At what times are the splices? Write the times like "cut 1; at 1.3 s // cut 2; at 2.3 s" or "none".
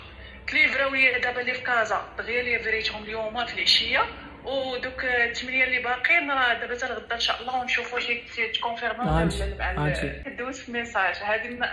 cut 1; at 10.3 s